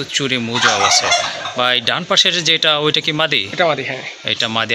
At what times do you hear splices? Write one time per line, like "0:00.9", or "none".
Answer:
none